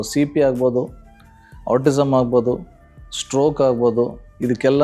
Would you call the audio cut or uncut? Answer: uncut